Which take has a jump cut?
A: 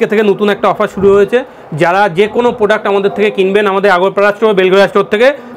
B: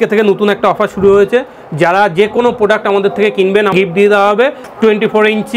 B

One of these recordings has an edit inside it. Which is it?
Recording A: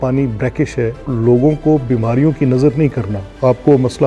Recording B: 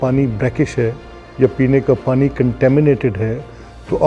A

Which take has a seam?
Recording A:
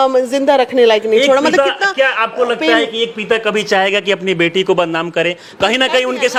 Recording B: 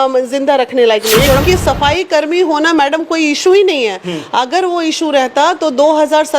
B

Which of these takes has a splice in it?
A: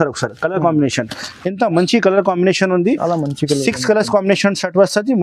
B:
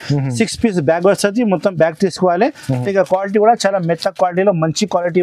B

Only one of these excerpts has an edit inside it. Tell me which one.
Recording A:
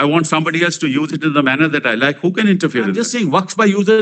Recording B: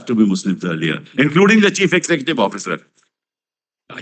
A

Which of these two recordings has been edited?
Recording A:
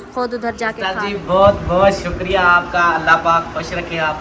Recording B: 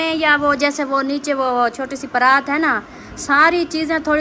A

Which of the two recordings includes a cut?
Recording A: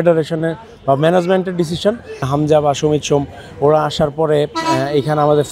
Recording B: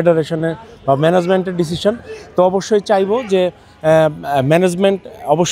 A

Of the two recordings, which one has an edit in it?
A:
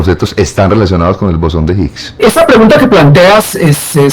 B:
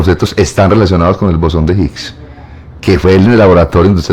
A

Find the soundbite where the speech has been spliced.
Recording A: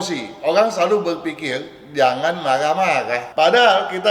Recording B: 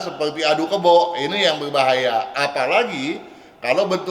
A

